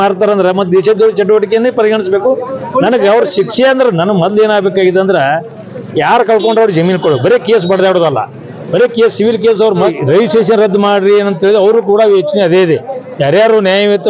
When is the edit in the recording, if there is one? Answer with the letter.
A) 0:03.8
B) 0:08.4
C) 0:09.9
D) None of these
C